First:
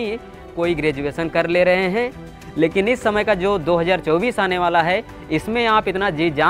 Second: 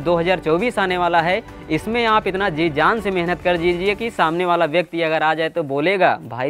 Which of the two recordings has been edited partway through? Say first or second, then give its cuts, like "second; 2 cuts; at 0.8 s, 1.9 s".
first; 1 cut; at 2.3 s